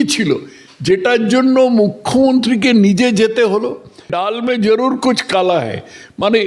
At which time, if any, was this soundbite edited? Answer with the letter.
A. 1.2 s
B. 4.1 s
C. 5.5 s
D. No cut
B